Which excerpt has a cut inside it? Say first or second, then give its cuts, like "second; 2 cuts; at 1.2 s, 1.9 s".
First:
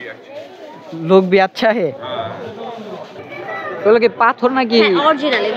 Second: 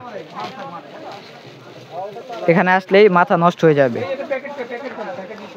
first; 1 cut; at 3.1 s